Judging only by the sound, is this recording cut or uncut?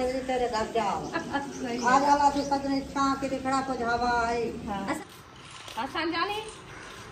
cut